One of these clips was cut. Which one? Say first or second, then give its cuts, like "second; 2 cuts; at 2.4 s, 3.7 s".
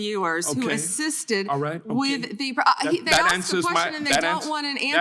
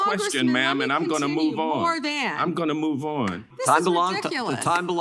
second; 1 cut; at 3.5 s